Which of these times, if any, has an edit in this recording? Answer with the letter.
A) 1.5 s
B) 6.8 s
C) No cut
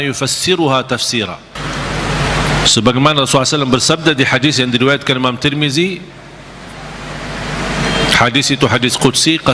A